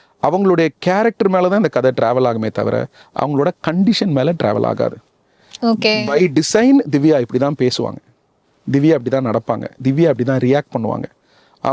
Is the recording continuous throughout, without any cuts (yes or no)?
yes